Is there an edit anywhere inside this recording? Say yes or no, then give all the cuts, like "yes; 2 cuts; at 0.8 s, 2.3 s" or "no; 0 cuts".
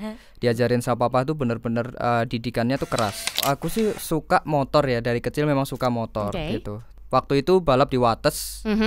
yes; 2 cuts; at 3.4 s, 6.9 s